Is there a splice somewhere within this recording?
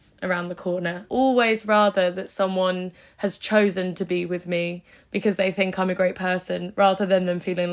yes; 1 cut; at 1.0 s

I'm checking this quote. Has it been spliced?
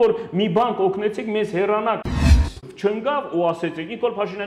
yes; 1 cut; at 2.3 s

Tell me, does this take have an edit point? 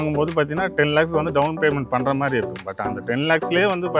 no; 0 cuts

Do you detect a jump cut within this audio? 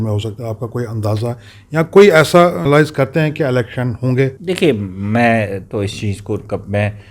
yes; 2 cuts; at 2.6 s, 4.4 s

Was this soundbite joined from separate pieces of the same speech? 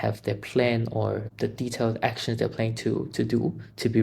yes; 1 cut; at 1.3 s

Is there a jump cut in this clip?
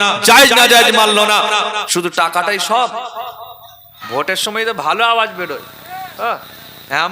yes; 2 cuts; at 1.9 s, 4.0 s

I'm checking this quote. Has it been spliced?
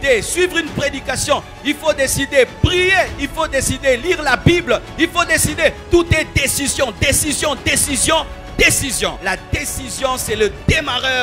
yes; 1 cut; at 9.2 s

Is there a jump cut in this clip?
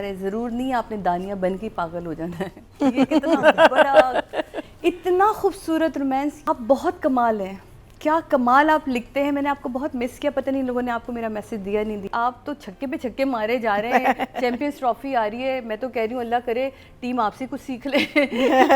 yes; 2 cuts; at 6.4 s, 12.0 s

